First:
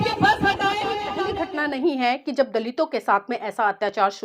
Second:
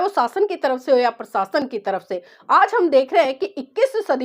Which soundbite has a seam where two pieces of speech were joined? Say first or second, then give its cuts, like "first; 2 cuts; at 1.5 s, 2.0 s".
first; 1 cut; at 1.3 s